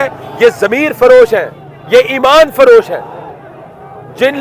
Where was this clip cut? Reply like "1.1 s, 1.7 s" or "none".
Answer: none